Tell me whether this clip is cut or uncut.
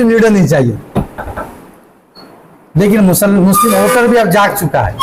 uncut